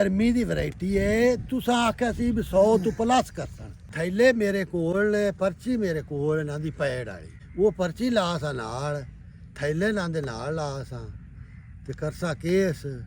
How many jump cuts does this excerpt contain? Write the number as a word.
two